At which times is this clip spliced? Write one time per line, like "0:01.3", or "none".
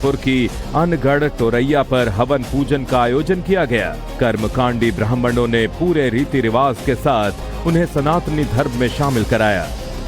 0:05.7